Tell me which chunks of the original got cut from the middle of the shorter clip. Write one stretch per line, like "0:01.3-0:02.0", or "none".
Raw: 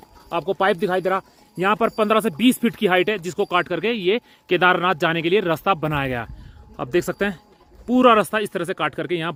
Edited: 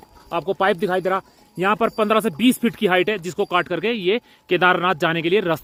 none

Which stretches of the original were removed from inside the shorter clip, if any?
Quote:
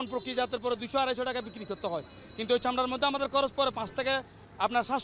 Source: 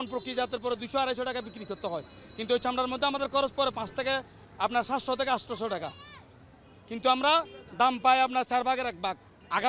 none

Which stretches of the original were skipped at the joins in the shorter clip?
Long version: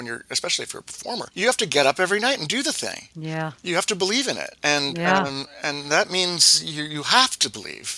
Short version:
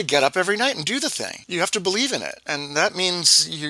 0:03.0-0:03.6
0:04.5-0:05.5

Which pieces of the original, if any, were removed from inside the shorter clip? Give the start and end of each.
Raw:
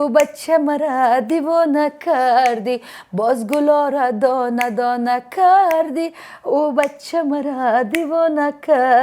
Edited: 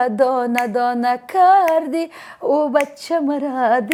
none

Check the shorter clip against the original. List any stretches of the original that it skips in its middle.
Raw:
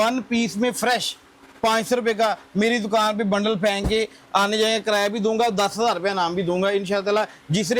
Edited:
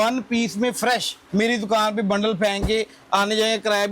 0:01.2-0:02.4

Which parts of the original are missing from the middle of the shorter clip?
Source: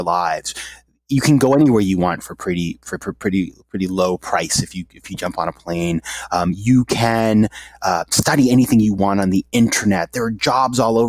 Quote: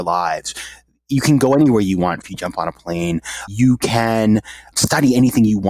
0:02.3-0:05.1
0:06.3-0:06.6
0:07.8-0:08.1

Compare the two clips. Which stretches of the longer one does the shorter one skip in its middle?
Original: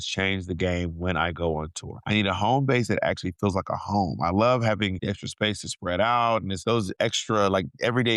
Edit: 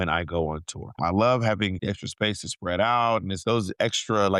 0:02.0-0:04.1

